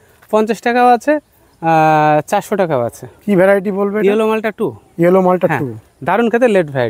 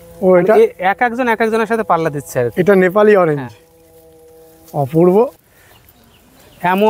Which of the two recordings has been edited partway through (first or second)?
second